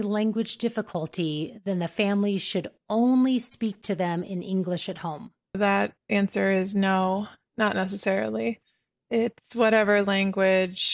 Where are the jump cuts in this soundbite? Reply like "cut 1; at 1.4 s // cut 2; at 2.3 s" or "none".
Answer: cut 1; at 5.6 s

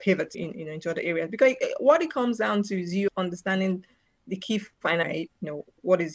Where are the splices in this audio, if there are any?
cut 1; at 4.7 s

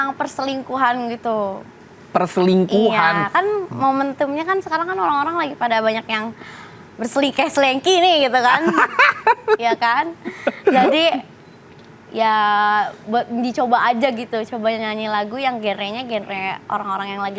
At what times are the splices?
none

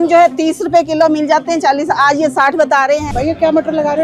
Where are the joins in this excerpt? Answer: cut 1; at 3.0 s

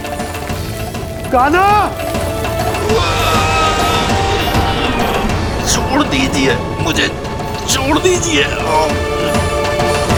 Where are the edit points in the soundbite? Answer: none

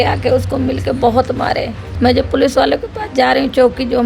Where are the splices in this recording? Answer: cut 1; at 1.8 s

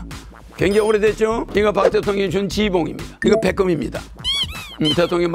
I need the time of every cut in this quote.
cut 1; at 1.5 s // cut 2; at 3.0 s

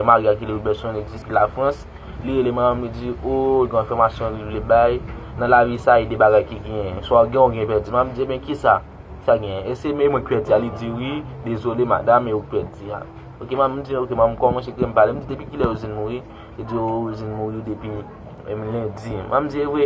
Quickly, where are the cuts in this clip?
cut 1; at 1.1 s

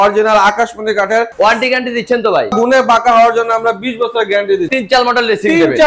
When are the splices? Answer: cut 1; at 1.3 s // cut 2; at 2.6 s // cut 3; at 4.7 s

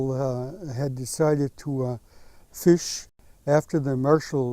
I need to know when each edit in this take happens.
cut 1; at 3.1 s

